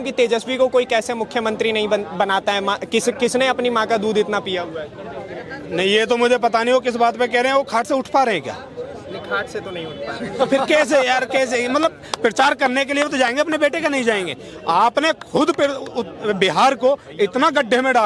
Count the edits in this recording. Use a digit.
0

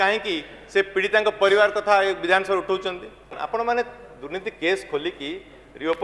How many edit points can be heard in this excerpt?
1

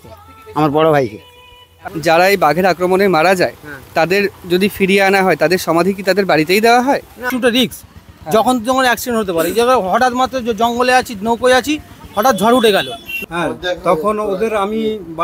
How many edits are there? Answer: 3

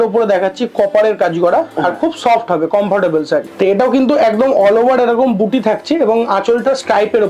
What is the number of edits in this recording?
1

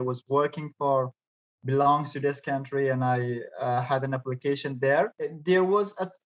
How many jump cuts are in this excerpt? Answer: 1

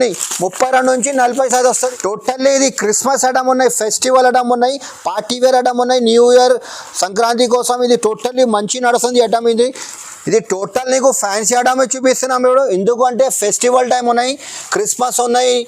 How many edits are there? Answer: 2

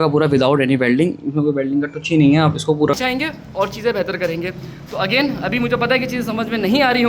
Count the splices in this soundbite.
1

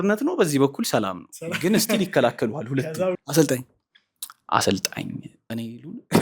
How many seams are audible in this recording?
1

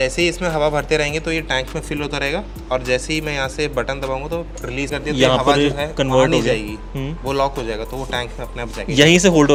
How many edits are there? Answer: 0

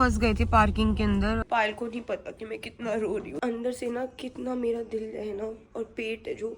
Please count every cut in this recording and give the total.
2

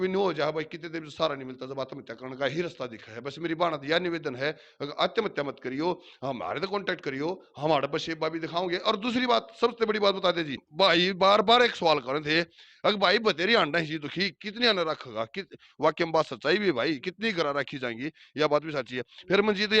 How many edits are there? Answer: 1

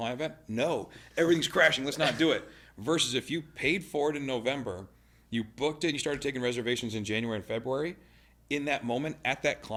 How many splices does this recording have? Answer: 0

